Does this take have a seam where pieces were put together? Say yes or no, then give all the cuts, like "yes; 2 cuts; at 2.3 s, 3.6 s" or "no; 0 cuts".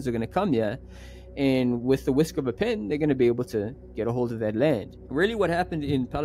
yes; 1 cut; at 5.0 s